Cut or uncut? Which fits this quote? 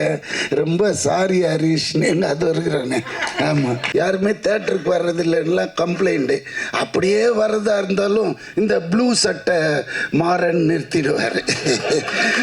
cut